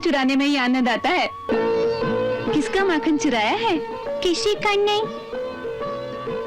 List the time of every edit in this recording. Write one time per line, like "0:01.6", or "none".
0:01.5